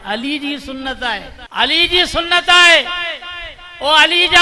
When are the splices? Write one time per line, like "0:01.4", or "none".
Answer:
0:01.4